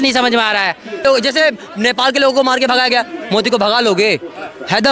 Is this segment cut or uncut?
cut